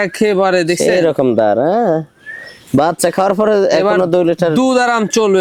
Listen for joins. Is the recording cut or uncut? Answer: uncut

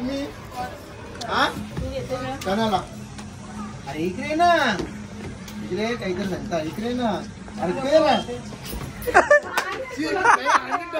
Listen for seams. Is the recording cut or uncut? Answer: uncut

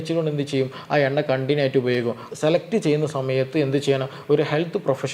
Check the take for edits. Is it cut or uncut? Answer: cut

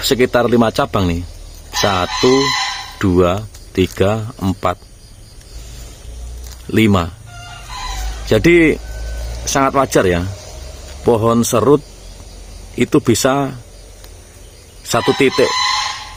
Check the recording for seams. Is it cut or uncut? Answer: uncut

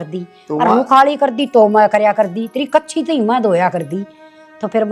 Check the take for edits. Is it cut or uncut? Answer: uncut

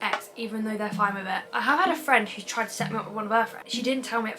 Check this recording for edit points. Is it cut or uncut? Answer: cut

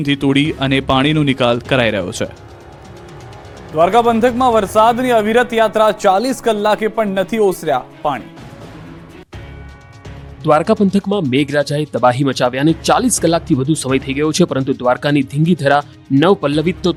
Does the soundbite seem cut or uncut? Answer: uncut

